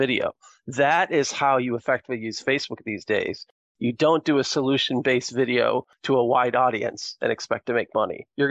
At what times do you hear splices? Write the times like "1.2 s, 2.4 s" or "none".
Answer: 5.9 s

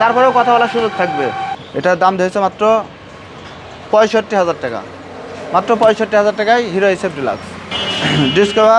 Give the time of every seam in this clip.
1.5 s, 7.7 s

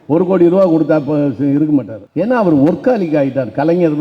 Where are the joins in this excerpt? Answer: 2.0 s

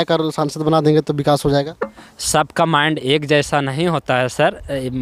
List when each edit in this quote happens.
none

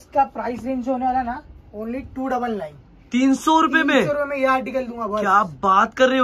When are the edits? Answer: none

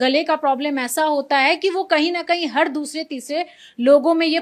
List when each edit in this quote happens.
none

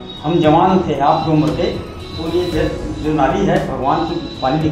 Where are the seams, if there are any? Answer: none

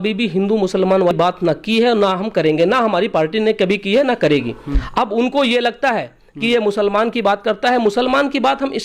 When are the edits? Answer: 1.1 s, 4.8 s

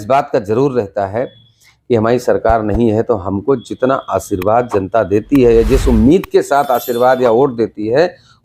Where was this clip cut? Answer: none

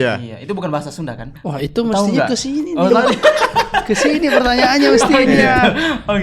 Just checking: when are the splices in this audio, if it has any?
1.3 s

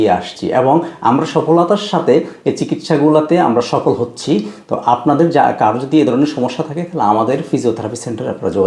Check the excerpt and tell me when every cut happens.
none

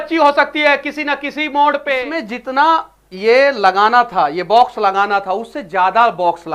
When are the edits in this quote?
2.0 s

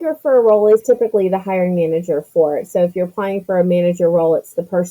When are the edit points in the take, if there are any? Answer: none

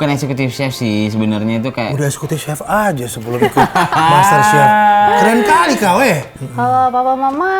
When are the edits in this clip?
6.3 s

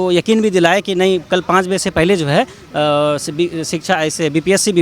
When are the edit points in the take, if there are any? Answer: none

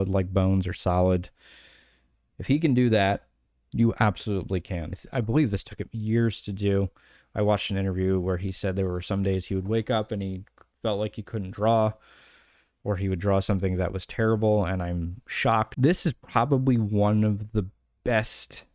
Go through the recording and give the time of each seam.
5.0 s, 15.7 s

